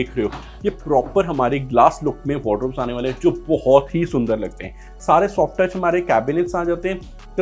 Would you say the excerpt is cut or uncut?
uncut